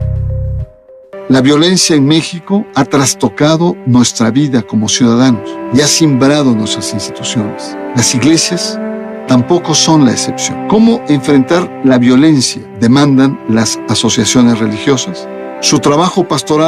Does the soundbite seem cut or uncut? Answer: cut